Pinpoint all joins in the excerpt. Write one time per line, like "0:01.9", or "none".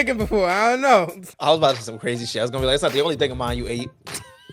0:01.2